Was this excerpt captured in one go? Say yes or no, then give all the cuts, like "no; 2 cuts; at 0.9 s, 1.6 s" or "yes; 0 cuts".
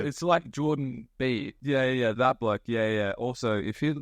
no; 1 cut; at 1.5 s